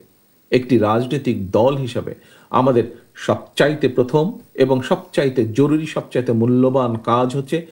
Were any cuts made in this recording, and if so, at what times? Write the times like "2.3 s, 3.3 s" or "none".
none